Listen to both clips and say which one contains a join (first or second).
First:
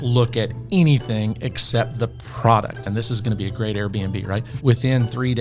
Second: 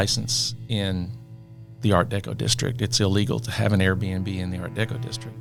first